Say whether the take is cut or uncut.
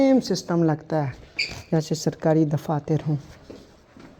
uncut